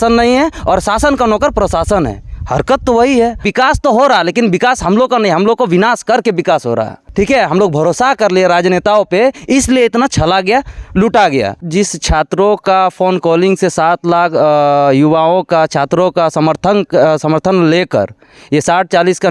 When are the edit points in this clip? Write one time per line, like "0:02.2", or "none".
0:03.4
0:07.0
0:11.6